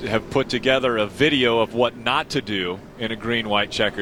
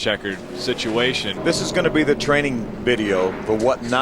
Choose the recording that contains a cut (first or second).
second